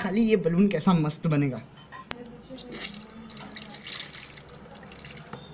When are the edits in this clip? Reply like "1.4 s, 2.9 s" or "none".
none